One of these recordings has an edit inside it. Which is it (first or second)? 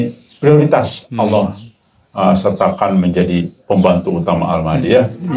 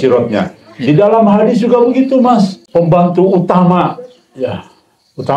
second